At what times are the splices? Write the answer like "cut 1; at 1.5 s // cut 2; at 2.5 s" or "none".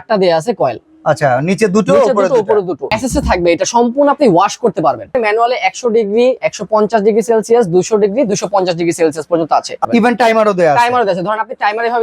cut 1; at 2.9 s // cut 2; at 5.1 s // cut 3; at 9.8 s